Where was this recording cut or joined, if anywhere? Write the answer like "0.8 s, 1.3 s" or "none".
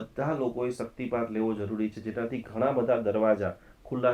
none